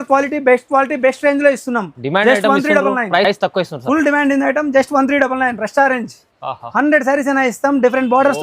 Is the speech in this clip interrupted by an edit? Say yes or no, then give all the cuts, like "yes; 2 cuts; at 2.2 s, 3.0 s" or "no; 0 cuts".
no; 0 cuts